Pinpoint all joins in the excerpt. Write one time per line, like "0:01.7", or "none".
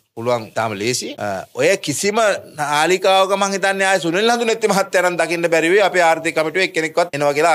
0:01.1